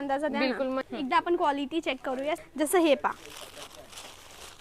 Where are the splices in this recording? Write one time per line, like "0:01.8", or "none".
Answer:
0:00.8
0:02.4